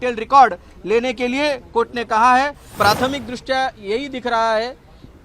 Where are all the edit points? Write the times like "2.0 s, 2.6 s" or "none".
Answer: 2.6 s